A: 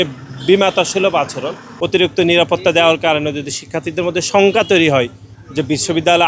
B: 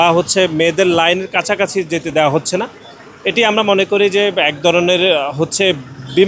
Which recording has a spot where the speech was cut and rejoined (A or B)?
A